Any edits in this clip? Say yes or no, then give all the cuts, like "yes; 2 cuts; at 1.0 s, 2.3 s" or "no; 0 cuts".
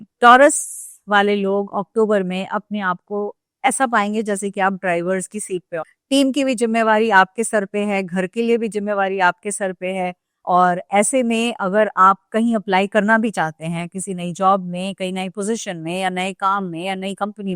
yes; 2 cuts; at 5.9 s, 10.3 s